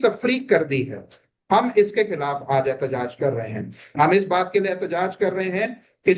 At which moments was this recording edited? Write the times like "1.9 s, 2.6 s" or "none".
none